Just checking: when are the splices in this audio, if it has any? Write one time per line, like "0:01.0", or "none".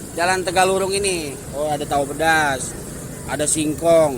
0:01.4